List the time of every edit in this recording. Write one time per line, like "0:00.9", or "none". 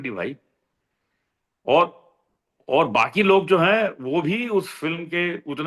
none